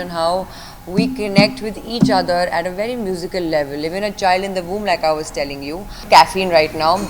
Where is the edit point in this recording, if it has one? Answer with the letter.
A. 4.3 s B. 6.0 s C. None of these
B